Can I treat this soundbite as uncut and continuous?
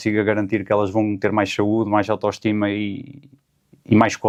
yes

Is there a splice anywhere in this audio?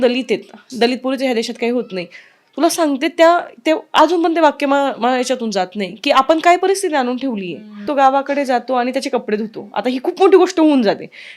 yes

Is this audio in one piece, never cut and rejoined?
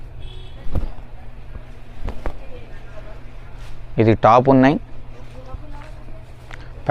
yes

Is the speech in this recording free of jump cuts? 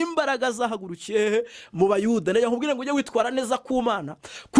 yes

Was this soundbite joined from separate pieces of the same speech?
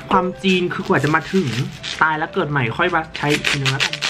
yes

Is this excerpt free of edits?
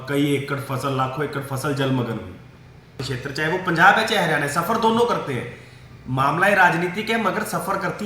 no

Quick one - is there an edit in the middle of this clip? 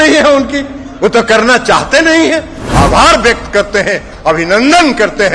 yes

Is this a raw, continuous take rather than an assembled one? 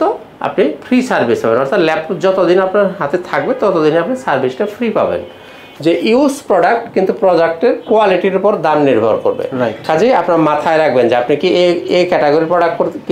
no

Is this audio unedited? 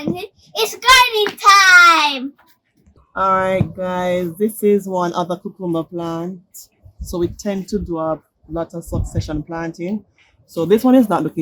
yes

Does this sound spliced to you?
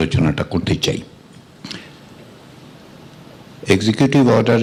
no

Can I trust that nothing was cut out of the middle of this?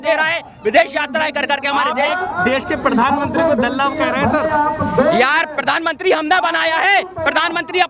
yes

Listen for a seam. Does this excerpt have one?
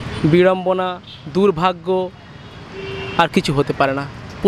no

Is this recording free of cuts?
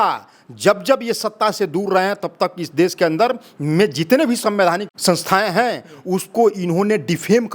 no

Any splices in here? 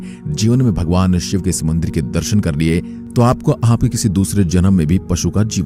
no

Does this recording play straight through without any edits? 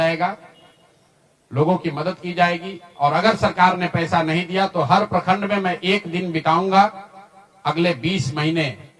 yes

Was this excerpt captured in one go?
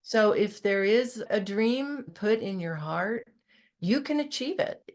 no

